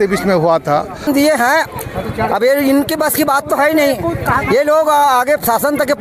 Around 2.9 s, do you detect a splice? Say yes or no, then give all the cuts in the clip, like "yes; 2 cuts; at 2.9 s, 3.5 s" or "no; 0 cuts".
no; 1 cut; at 1.1 s